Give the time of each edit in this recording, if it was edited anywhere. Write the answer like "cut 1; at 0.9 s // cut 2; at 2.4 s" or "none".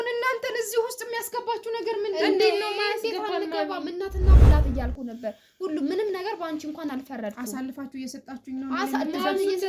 cut 1; at 4.5 s